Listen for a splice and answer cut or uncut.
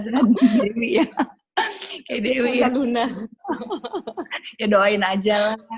uncut